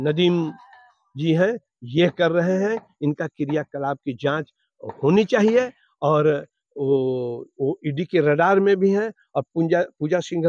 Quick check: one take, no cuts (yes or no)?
yes